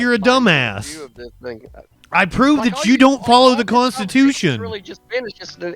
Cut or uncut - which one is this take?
cut